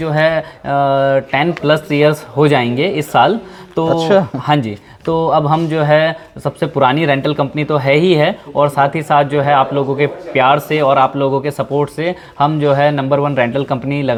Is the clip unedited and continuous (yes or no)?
yes